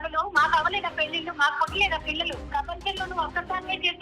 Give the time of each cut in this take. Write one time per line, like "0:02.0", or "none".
0:02.5